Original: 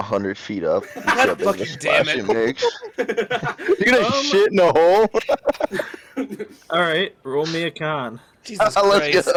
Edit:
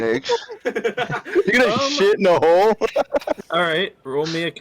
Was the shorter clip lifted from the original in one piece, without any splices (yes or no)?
no